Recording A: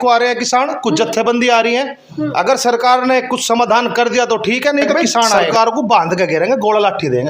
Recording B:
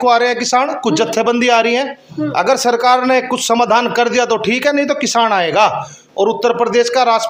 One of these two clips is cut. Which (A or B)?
A